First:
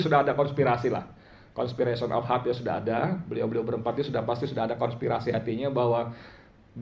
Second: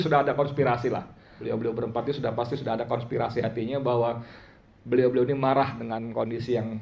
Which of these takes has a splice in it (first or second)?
second